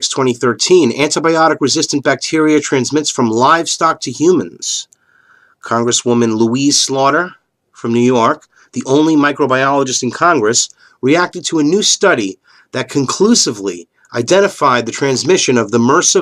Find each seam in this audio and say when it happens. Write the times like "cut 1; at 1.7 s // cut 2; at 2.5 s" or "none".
cut 1; at 7.0 s